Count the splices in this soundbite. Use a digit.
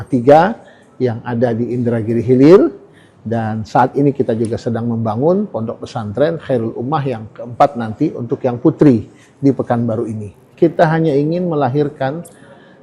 1